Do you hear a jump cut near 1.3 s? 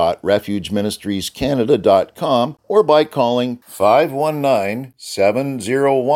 no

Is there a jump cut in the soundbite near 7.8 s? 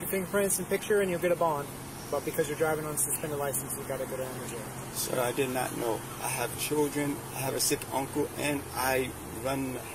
no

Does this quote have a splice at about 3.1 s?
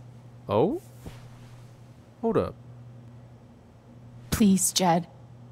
yes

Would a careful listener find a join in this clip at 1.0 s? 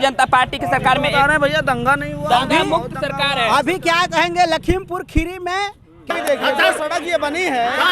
no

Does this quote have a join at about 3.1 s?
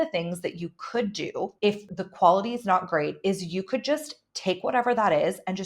no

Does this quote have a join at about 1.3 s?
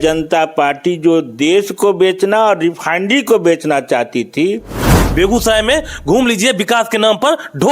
no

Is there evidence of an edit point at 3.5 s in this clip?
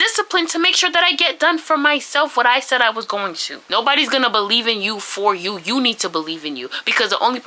yes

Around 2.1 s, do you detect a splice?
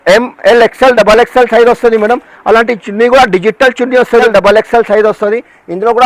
no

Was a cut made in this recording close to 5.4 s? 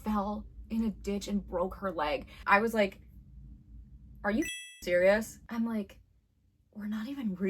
yes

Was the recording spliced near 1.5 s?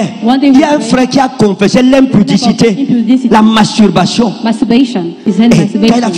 no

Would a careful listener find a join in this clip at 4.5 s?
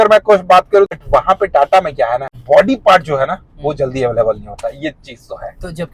no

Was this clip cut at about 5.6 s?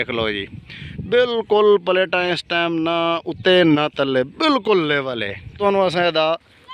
yes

